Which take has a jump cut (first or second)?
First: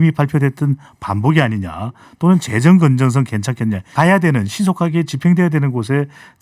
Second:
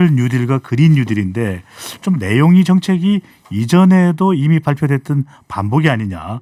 first